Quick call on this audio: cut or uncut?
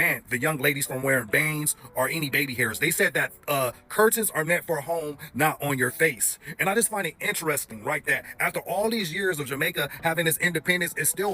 uncut